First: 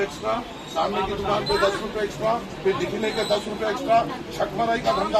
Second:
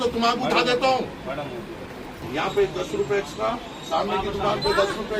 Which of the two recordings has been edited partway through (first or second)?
second